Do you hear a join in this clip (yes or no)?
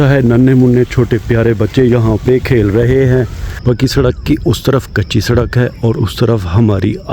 yes